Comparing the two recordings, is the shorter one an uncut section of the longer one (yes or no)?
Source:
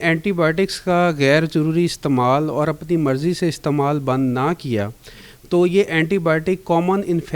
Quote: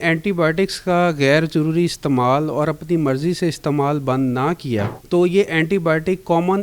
no